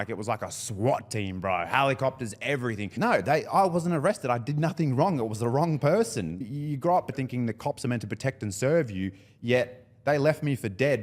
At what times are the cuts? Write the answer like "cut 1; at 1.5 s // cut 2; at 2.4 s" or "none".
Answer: cut 1; at 2.9 s // cut 2; at 6.4 s // cut 3; at 7.2 s